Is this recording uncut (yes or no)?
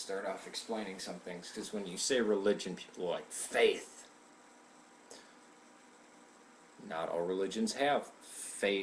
no